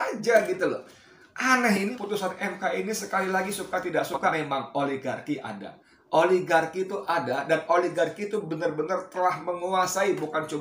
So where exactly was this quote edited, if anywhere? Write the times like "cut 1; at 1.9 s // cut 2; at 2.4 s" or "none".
cut 1; at 1.9 s // cut 2; at 4.3 s